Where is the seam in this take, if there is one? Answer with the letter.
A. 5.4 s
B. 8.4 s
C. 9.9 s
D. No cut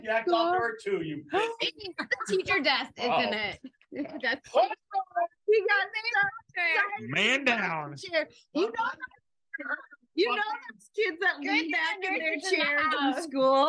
A